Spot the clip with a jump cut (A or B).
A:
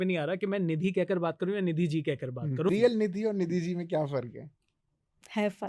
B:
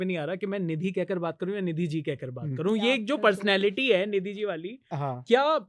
A